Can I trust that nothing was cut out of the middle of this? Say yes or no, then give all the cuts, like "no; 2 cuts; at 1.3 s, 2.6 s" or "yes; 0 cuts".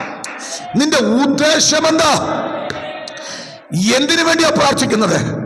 yes; 0 cuts